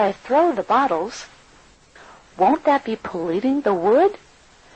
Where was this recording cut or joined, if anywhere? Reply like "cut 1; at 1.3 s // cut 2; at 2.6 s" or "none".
none